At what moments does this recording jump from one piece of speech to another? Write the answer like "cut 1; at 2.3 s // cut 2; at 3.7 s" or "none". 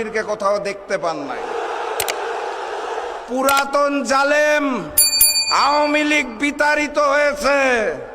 cut 1; at 1.4 s // cut 2; at 3.2 s